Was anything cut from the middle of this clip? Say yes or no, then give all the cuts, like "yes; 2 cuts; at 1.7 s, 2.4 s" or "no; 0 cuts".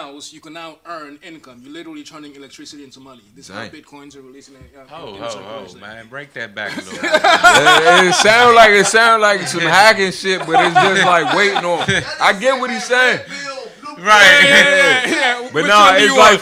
no; 0 cuts